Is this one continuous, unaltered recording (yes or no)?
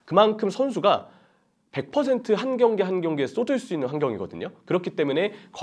yes